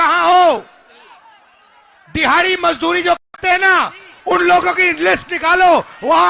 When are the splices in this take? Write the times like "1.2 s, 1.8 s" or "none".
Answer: none